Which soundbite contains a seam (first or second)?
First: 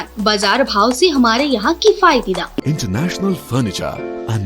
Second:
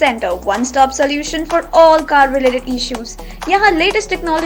first